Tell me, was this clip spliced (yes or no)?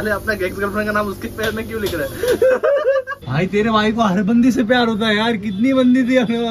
yes